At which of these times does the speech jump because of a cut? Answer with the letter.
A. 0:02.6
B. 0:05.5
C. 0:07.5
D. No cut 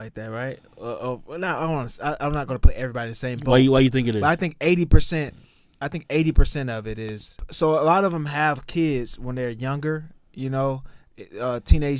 C